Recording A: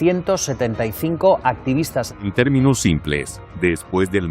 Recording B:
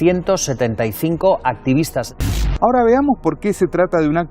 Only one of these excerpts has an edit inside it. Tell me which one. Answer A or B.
A